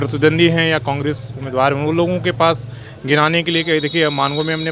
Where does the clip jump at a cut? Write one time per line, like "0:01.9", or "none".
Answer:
none